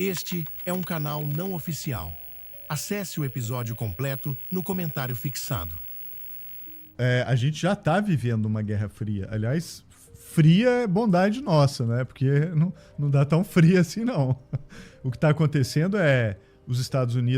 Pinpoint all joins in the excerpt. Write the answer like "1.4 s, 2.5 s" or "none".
6.9 s